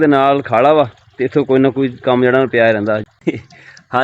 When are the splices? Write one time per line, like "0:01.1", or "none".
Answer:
0:03.1